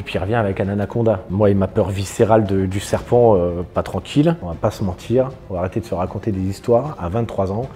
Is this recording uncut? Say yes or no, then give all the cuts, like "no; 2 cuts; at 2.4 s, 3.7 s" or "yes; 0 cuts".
no; 2 cuts; at 1.3 s, 4.5 s